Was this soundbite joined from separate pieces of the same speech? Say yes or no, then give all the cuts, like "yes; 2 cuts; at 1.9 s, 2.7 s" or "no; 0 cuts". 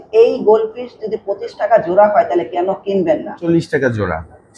yes; 1 cut; at 3.4 s